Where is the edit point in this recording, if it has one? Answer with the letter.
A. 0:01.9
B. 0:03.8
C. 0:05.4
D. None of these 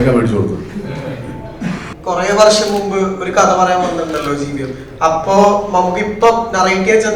A